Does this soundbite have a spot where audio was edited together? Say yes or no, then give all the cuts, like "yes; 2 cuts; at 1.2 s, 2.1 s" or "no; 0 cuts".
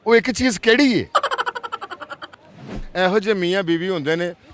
yes; 2 cuts; at 1.1 s, 2.8 s